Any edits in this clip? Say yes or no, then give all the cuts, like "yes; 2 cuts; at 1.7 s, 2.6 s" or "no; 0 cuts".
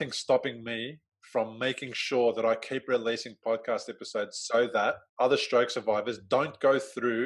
yes; 2 cuts; at 1.1 s, 5.1 s